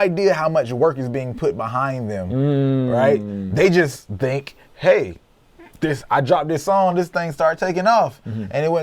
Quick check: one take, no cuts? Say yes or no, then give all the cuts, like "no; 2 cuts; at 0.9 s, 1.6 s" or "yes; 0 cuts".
yes; 0 cuts